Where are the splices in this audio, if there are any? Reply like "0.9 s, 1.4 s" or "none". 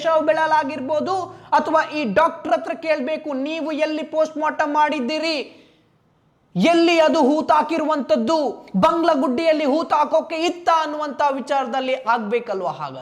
none